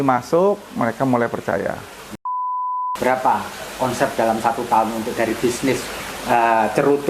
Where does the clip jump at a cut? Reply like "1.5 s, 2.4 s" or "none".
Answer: 2.5 s